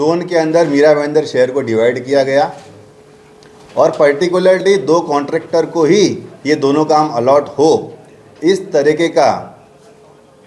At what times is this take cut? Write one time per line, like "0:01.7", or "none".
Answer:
none